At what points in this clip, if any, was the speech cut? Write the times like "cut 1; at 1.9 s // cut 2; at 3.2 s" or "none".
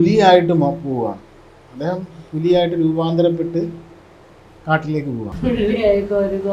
cut 1; at 5.3 s